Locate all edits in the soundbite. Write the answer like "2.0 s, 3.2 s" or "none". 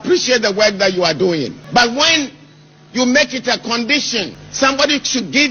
1.6 s, 4.4 s

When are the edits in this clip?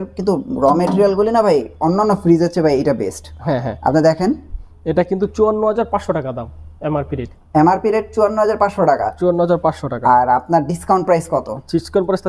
none

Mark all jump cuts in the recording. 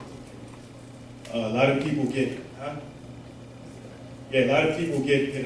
4.2 s

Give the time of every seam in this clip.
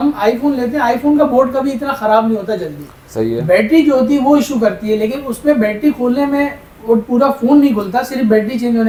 none

